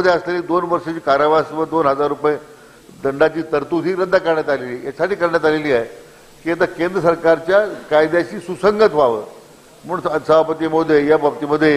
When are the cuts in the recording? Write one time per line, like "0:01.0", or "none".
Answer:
none